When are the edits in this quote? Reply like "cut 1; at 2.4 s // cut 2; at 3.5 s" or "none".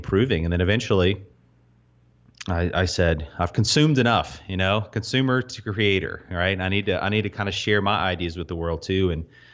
none